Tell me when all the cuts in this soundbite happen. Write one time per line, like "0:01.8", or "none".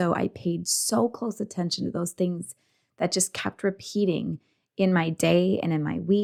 none